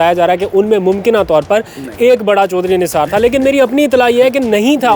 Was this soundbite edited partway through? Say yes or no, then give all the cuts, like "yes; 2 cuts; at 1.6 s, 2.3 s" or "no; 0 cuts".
no; 0 cuts